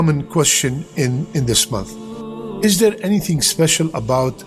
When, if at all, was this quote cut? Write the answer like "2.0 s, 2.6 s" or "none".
none